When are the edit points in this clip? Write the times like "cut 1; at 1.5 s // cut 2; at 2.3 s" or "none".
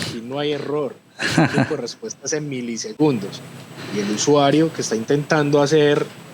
none